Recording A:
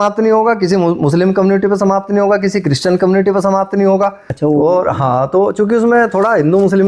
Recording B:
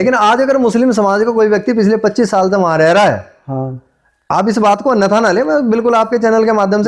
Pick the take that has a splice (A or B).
A